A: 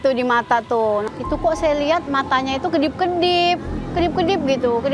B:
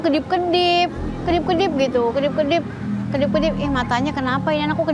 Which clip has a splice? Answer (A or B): A